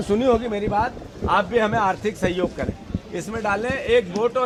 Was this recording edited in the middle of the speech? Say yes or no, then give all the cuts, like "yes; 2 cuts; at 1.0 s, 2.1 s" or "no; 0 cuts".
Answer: no; 0 cuts